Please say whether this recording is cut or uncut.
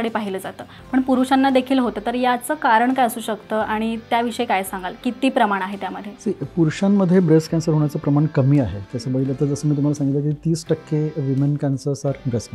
uncut